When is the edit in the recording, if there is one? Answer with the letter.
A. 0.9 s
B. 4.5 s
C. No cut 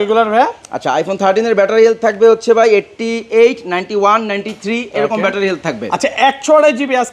C